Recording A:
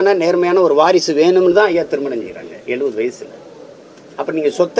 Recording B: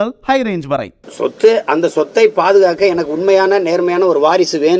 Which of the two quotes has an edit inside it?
B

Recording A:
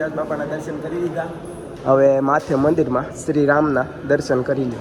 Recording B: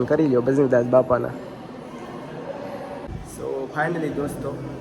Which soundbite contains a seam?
B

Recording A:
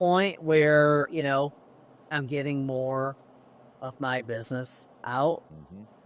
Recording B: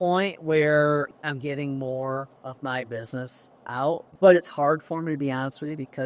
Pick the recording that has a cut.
B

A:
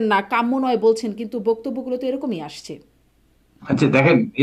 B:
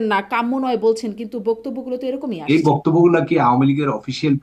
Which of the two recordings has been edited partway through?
B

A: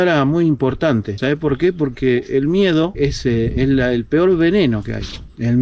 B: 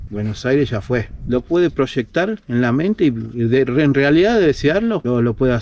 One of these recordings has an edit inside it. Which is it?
B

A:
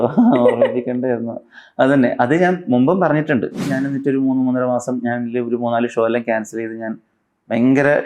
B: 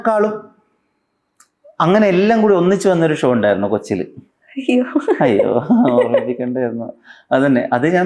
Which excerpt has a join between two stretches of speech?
A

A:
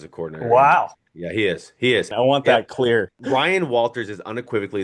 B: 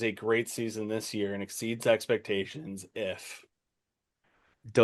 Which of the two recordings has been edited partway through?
A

